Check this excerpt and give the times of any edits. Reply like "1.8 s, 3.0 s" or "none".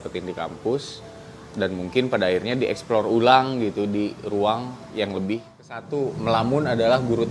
5.9 s